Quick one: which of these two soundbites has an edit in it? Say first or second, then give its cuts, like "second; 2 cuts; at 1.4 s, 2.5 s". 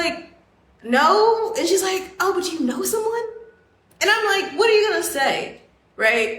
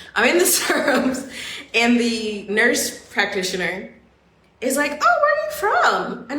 second; 1 cut; at 2.5 s